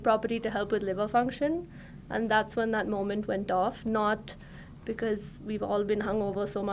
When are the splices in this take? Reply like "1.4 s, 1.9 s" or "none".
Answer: none